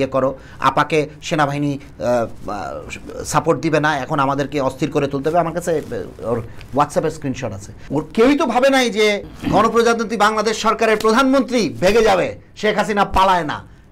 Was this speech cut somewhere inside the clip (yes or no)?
yes